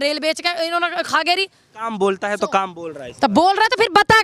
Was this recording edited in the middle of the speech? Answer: yes; 1 cut; at 1.8 s

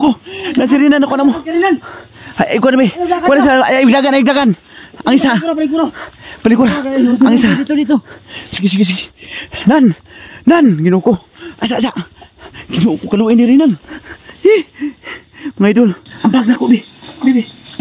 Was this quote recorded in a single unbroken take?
no; 1 cut; at 16.1 s

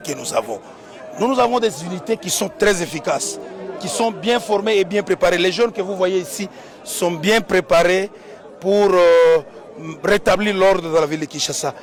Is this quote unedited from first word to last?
yes; 0 cuts

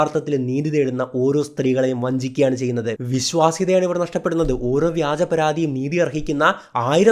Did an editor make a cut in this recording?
yes; 1 cut; at 3.0 s

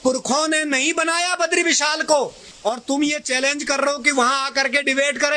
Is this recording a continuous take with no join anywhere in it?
no; 1 cut; at 2.4 s

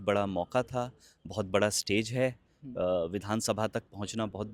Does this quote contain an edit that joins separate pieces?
no; 0 cuts

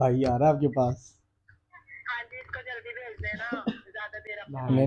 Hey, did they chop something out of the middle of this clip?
no; 0 cuts

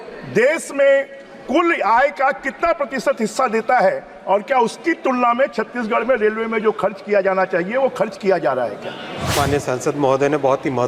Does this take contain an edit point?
yes; 1 cut; at 9.3 s

